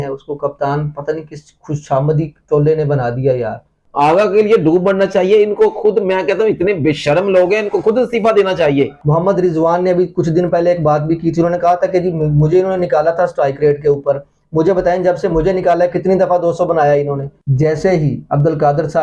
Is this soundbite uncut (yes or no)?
no